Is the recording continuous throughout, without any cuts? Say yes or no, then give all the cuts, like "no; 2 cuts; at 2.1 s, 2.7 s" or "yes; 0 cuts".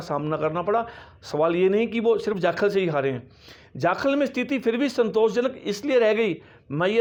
yes; 0 cuts